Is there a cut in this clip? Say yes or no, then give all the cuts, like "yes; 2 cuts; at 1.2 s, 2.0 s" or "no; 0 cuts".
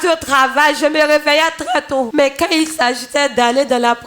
yes; 1 cut; at 2.1 s